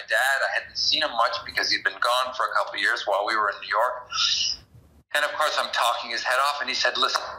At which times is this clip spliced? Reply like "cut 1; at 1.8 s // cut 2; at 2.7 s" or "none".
none